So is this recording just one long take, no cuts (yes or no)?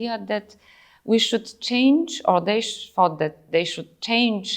yes